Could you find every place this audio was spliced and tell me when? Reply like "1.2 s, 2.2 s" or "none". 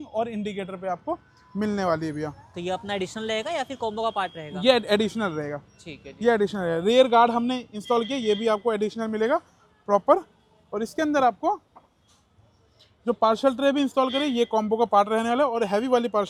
none